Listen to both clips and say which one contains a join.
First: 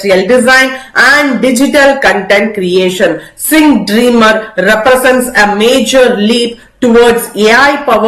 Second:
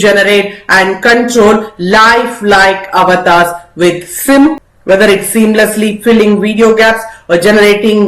second; 1 cut; at 4.5 s

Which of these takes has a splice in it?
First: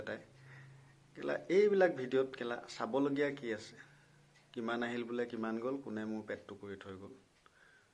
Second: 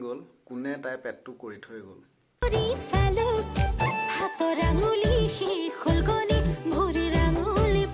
second; 1 cut; at 2.4 s

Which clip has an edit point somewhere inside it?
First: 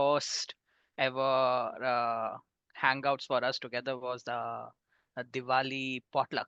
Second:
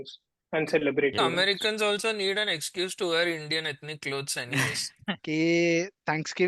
second; 2 cuts; at 1.2 s, 5.2 s

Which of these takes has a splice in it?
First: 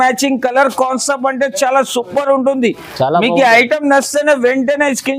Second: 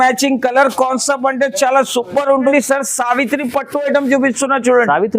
second; 1 cut; at 2.5 s

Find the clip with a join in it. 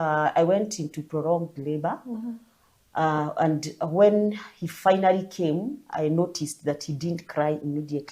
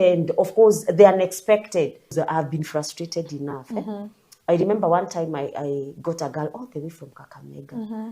second; 1 cut; at 2.1 s

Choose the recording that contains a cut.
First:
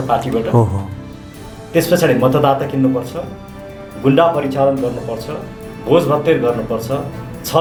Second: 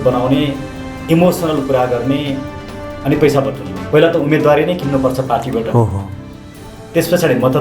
second; 1 cut; at 3.7 s

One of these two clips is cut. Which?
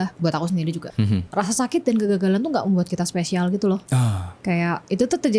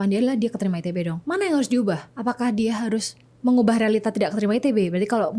second; 1 cut; at 1.2 s

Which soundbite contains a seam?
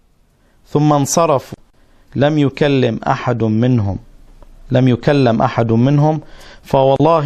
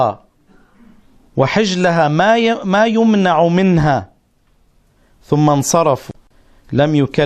second; 1 cut; at 3.4 s

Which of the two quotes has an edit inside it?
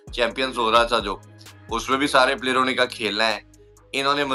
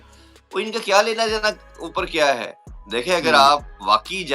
second; 1 cut; at 2.6 s

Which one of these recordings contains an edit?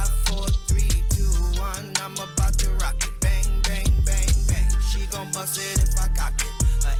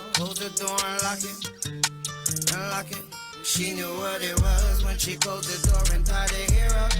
second; 1 cut; at 3.5 s

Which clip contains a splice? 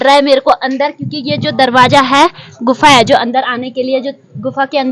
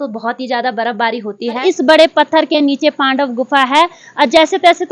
second; 1 cut; at 1.6 s

